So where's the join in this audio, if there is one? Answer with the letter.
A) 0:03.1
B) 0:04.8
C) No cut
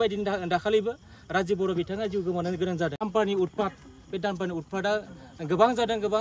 A